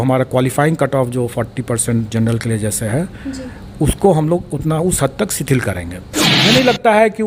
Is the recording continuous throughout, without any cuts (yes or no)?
no